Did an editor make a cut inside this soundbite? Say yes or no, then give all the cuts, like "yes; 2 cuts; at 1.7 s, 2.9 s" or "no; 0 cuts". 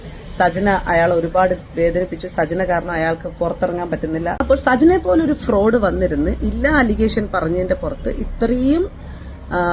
yes; 1 cut; at 4.3 s